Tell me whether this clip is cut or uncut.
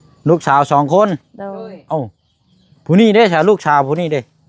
uncut